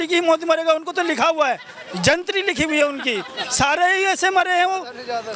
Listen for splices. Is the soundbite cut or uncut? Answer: uncut